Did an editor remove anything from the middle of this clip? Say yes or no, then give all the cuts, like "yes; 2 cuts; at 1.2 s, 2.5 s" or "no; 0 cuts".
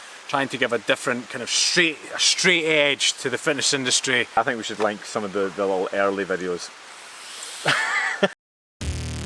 yes; 2 cuts; at 4.4 s, 8.4 s